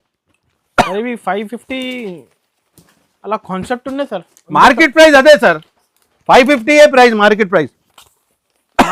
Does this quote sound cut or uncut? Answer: uncut